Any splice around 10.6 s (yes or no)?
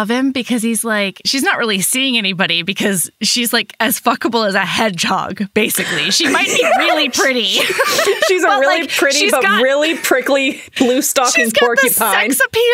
no